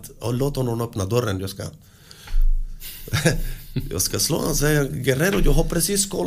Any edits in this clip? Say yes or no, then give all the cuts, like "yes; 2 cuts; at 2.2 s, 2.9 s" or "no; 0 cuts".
no; 0 cuts